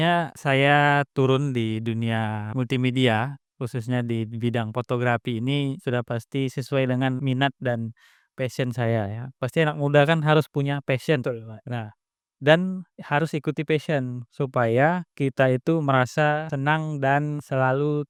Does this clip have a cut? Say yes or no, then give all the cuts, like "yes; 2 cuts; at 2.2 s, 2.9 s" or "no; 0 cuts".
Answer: no; 0 cuts